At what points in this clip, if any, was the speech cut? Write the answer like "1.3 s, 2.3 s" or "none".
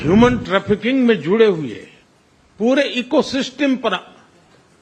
none